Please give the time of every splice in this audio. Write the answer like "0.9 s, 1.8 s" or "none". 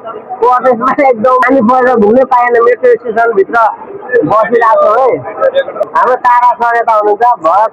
1.4 s, 5.8 s